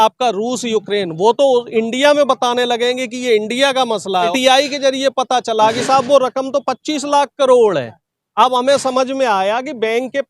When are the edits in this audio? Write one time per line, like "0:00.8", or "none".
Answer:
0:04.3